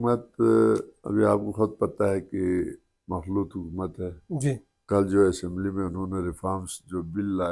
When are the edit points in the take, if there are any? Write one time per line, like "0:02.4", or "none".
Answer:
0:00.9
0:04.7